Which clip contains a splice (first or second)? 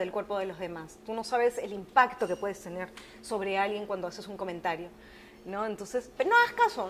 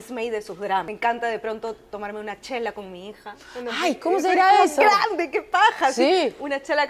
second